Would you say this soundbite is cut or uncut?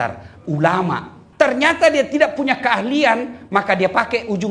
cut